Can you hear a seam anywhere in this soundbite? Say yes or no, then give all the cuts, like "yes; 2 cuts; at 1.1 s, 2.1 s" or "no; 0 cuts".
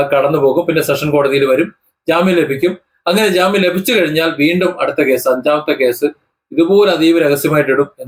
no; 0 cuts